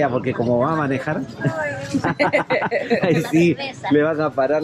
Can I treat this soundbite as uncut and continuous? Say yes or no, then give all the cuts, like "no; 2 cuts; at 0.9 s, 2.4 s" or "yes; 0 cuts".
yes; 0 cuts